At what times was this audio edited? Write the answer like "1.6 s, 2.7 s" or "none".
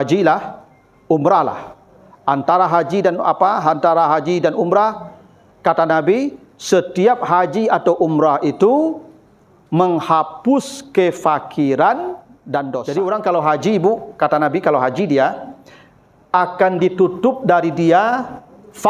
12.8 s